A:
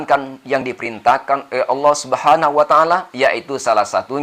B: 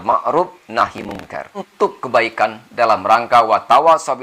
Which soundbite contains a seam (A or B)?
B